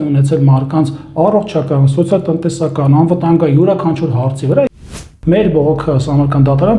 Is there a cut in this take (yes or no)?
yes